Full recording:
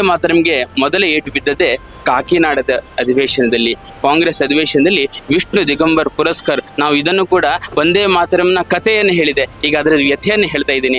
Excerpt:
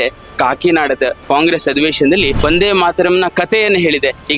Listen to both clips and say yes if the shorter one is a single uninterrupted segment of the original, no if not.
no